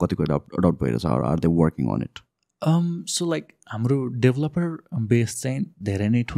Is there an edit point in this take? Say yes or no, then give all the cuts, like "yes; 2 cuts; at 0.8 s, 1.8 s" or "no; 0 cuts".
no; 0 cuts